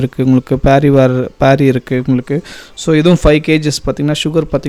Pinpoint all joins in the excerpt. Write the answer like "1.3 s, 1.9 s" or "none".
none